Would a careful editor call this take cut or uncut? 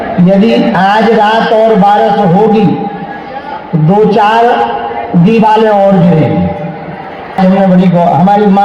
cut